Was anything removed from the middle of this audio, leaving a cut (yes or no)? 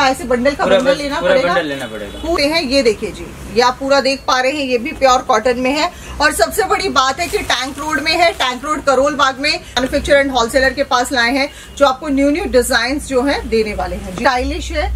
yes